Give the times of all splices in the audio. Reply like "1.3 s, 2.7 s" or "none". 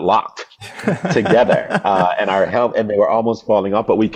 none

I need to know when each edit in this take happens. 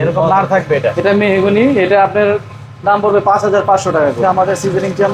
1.0 s, 4.2 s

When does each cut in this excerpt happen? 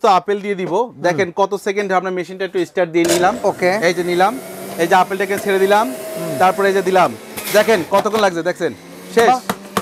none

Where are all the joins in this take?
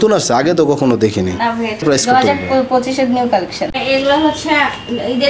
1.8 s, 3.6 s

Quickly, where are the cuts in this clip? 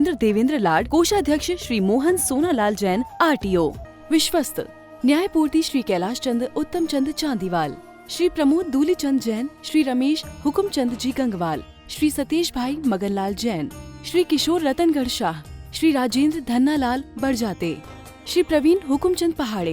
3.9 s

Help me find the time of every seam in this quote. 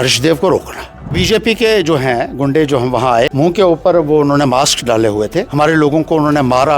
1.2 s, 3.3 s, 5.4 s

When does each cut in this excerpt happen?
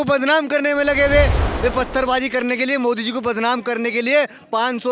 1.4 s

